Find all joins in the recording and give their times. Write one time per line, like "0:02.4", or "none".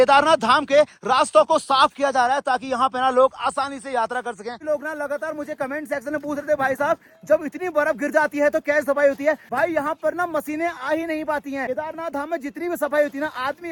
none